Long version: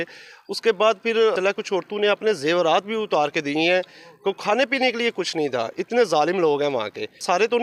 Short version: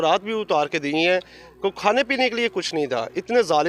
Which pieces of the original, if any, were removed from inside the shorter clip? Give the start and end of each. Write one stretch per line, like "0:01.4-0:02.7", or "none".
none